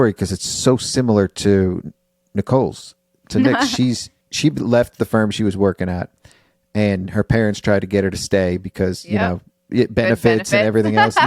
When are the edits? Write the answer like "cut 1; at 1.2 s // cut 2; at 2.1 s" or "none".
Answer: cut 1; at 4.2 s